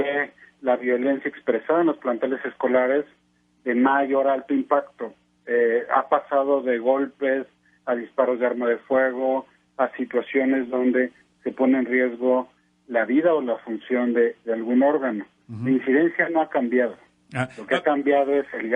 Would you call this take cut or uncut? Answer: uncut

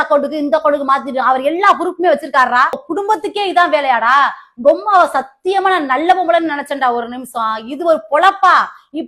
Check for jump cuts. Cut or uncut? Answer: cut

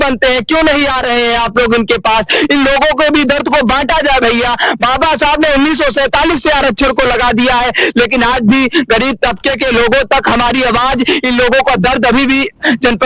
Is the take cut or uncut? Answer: uncut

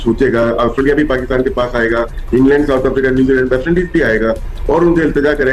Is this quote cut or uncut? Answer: uncut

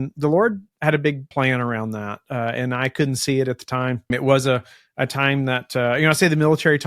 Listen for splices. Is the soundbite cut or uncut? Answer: cut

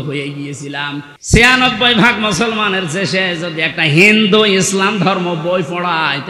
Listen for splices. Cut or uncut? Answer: cut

